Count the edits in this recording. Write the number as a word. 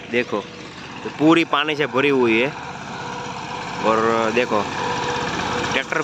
zero